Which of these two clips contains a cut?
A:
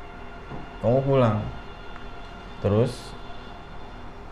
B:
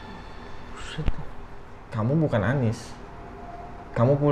B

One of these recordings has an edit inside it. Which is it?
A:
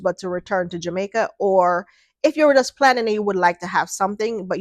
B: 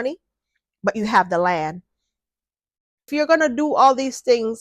B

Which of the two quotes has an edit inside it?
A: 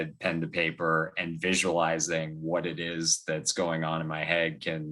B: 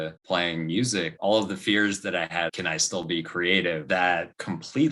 B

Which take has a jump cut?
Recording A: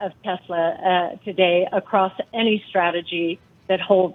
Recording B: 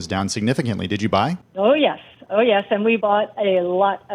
B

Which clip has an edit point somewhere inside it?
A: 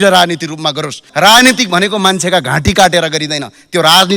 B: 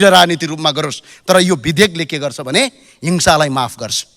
A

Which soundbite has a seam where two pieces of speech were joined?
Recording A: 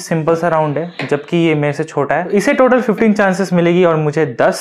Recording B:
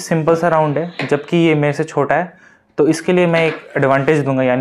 A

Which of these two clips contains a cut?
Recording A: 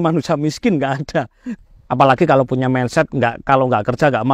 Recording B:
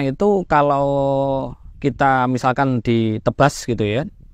A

